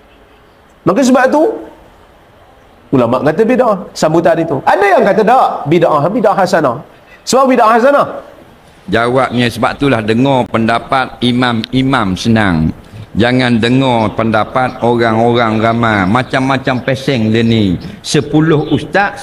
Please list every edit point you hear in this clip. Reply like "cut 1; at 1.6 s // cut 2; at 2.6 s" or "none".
cut 1; at 8.3 s